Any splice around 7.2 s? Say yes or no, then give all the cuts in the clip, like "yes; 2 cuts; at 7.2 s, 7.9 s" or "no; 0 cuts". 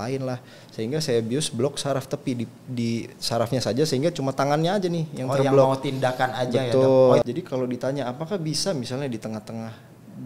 yes; 1 cut; at 7.2 s